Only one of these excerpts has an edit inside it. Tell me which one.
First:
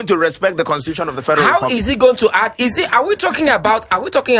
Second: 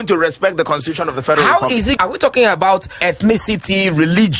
second; 2 cuts; at 2.0 s, 3.0 s

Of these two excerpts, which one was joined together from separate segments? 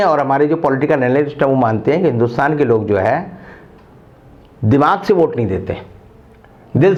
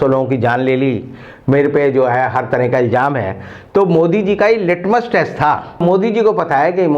second; 1 cut; at 5.8 s

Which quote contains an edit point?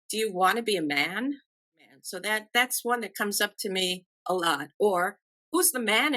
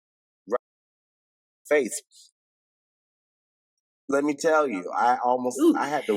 first; 1 cut; at 2.0 s

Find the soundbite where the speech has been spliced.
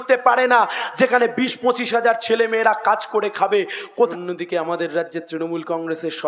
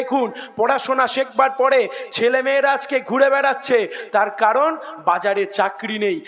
first; 1 cut; at 4.1 s

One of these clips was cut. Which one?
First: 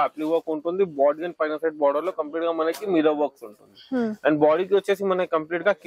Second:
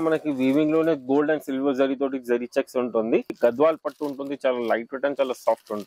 second; 1 cut; at 3.4 s

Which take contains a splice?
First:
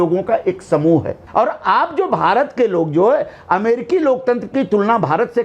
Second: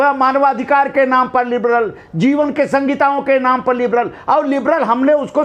first; 1 cut; at 1.2 s

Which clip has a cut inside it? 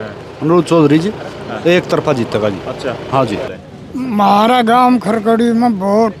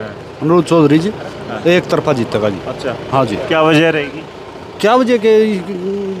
first; 1 cut; at 3.4 s

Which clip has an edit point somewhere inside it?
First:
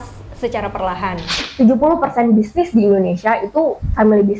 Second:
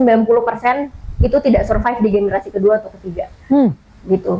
first; 1 cut; at 1.4 s

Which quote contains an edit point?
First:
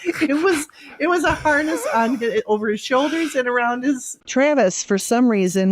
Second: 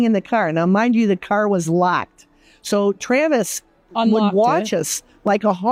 first; 1 cut; at 4.2 s

